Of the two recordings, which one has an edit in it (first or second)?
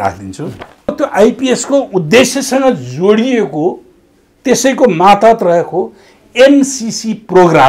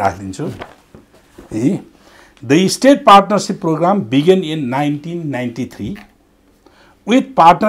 first